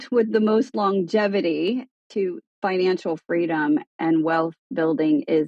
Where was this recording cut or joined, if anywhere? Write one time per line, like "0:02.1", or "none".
0:02.2
0:03.9